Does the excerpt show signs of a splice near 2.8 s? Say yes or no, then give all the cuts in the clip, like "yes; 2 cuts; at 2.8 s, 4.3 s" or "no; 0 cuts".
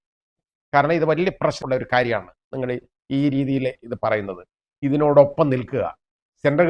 no; 1 cut; at 1.6 s